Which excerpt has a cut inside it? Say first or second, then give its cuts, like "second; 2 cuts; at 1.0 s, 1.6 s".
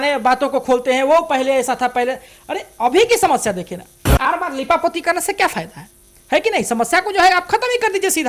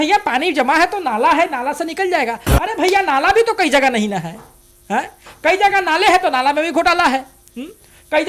first; 1 cut; at 4.3 s